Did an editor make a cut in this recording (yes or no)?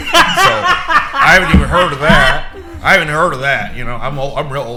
no